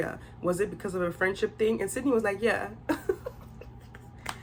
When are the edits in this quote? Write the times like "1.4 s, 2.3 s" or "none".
none

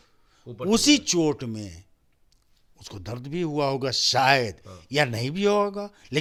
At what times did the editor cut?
none

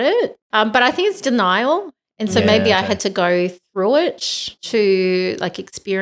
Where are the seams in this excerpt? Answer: none

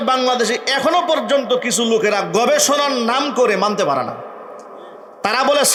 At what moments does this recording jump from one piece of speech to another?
none

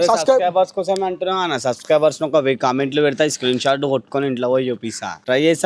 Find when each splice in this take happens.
none

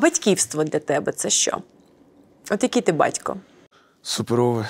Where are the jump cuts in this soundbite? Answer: none

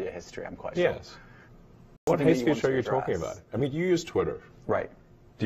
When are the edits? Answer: 2.1 s

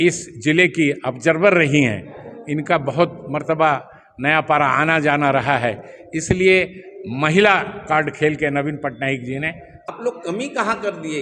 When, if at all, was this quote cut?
9.8 s

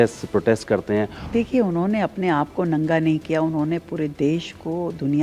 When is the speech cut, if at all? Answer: 1.2 s

